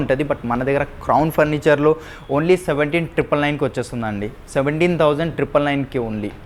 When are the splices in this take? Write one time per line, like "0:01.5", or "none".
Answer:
none

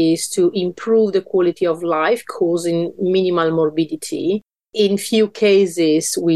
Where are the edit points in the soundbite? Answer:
0:04.7

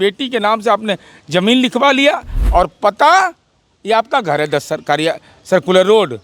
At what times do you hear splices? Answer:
0:02.3

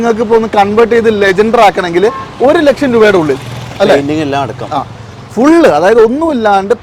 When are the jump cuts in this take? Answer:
none

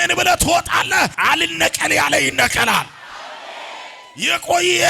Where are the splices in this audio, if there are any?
0:01.1

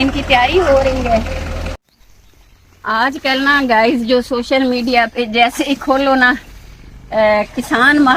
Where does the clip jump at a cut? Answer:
none

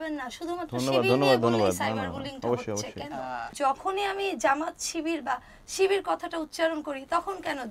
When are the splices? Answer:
0:03.5

